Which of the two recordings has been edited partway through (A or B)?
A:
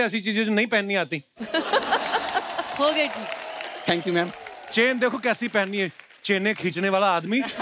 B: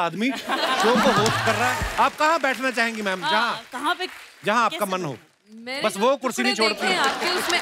B